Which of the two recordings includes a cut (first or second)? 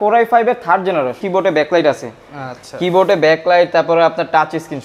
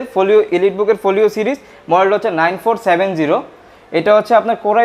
first